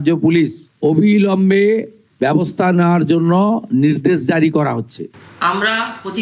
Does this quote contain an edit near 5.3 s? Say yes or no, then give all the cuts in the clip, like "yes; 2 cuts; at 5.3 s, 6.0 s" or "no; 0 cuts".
yes; 1 cut; at 5.3 s